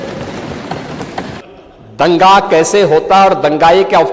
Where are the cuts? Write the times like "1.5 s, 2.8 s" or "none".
1.4 s